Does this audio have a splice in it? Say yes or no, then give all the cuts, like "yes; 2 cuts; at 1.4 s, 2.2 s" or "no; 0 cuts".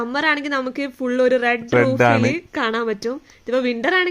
no; 0 cuts